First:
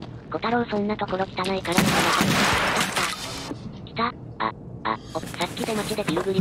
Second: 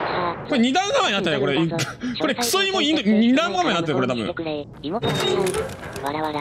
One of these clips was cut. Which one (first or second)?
first